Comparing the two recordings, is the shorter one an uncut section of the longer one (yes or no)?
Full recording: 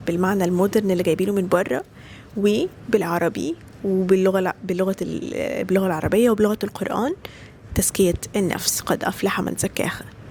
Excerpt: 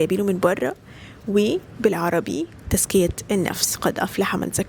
no